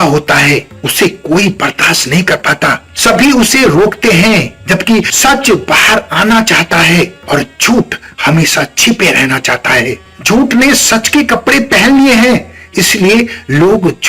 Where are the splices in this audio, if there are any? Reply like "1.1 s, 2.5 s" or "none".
10.1 s